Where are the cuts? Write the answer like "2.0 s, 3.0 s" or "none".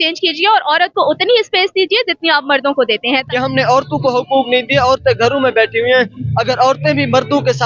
3.3 s